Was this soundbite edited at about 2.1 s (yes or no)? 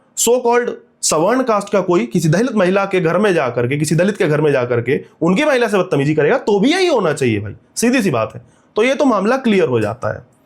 no